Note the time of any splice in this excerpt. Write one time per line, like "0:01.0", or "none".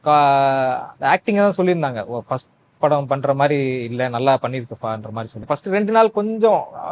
0:05.5